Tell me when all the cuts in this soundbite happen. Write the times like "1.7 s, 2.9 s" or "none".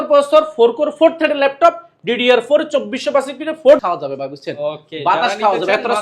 3.8 s

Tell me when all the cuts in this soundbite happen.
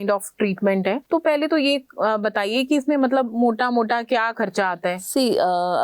1.0 s

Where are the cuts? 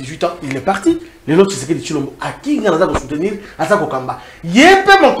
none

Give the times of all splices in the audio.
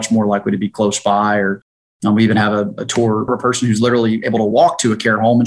3.3 s

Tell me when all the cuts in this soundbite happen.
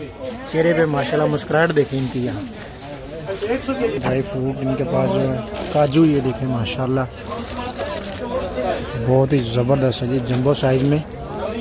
4.0 s

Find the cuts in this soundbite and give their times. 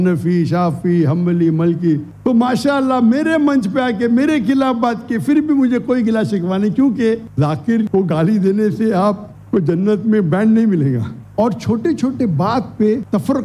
2.1 s, 7.3 s, 11.1 s

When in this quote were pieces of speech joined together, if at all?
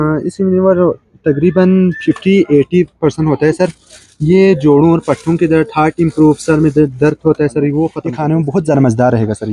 8.0 s

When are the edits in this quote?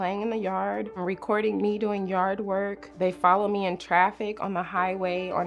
2.8 s

